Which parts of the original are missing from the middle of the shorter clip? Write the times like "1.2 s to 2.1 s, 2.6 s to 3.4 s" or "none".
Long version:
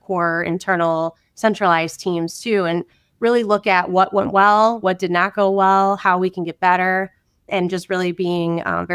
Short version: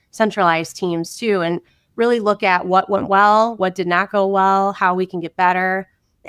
none